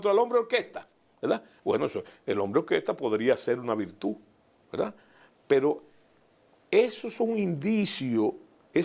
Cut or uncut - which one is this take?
uncut